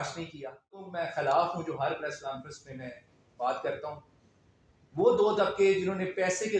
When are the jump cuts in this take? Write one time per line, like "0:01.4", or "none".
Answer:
0:01.0